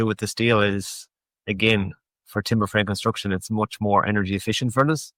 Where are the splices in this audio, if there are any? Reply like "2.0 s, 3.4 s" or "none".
none